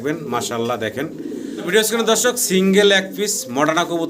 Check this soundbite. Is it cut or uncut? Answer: cut